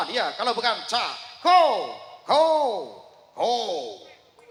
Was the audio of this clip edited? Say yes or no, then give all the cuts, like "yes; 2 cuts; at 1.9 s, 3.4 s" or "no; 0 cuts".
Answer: no; 0 cuts